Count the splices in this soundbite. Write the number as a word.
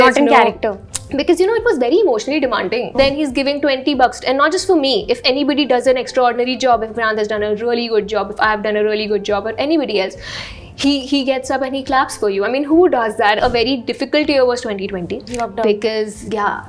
two